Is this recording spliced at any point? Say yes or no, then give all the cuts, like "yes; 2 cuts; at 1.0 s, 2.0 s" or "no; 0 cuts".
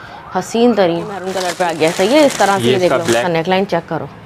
yes; 2 cuts; at 1.4 s, 3.3 s